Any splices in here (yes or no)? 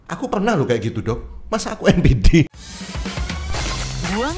yes